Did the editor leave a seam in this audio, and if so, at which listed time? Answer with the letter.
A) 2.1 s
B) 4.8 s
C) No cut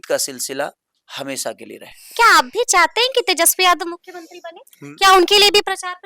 A